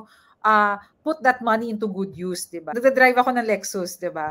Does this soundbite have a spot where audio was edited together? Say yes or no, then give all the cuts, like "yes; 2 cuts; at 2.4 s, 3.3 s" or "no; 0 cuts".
yes; 1 cut; at 2.6 s